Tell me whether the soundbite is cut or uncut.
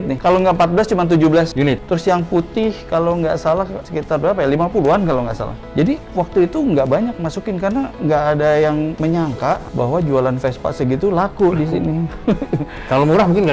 uncut